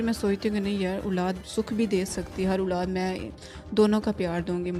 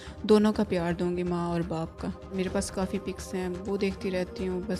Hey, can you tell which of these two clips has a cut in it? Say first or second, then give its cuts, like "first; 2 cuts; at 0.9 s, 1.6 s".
second; 1 cut; at 2.3 s